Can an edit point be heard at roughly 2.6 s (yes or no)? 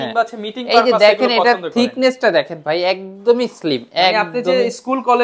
no